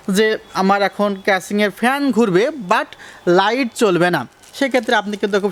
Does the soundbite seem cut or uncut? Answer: uncut